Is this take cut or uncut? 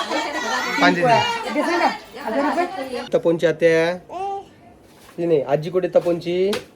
cut